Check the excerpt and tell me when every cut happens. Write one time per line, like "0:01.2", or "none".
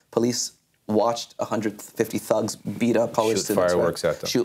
0:03.1